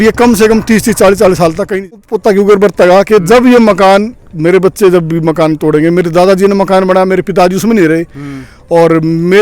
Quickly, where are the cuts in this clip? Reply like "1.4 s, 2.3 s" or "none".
1.9 s